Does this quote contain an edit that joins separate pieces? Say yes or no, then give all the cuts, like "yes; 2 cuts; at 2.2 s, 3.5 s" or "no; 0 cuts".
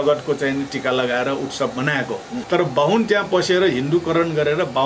yes; 1 cut; at 2.4 s